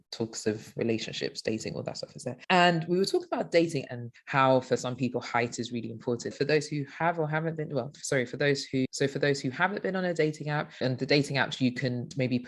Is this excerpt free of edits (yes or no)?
yes